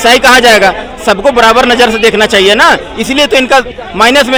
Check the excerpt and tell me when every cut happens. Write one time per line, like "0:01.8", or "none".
none